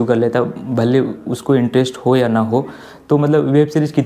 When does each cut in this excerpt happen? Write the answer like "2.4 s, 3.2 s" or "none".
none